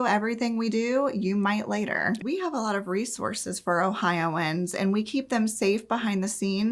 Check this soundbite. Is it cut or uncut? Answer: cut